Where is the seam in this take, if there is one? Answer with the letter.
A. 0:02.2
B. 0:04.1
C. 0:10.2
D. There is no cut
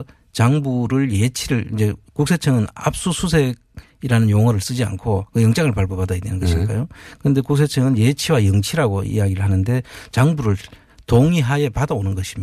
B